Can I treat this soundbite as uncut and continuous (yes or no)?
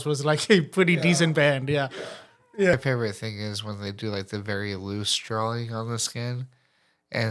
no